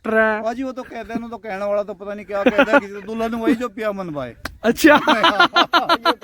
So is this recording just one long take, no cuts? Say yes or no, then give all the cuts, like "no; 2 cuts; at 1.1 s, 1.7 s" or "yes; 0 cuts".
yes; 0 cuts